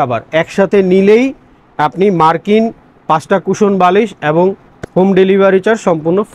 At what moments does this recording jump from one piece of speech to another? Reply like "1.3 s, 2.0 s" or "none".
none